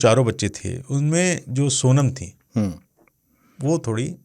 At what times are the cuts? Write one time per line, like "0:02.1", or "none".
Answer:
none